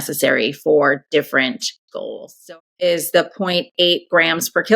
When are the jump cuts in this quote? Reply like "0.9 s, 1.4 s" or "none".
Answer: 2.4 s